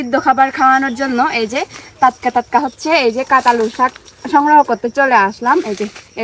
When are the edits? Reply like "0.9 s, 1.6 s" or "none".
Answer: none